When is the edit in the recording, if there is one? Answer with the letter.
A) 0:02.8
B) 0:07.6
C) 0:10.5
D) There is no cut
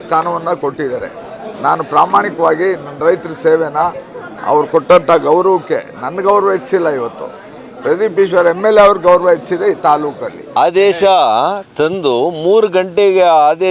C